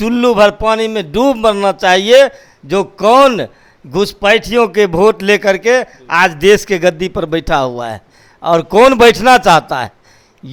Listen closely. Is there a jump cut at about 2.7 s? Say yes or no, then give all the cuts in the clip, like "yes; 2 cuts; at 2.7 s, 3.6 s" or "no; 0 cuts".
no; 0 cuts